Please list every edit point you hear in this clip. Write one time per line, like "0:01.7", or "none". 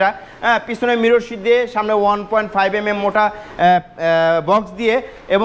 none